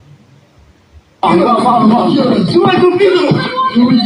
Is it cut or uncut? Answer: uncut